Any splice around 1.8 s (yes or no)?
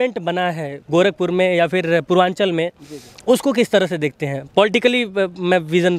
no